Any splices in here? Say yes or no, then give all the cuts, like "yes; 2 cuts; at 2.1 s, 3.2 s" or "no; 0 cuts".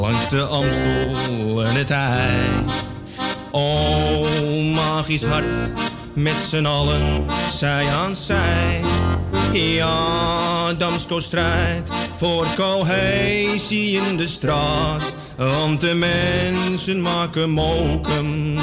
no; 0 cuts